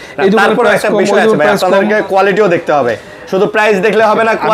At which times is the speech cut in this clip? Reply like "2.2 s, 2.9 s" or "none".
none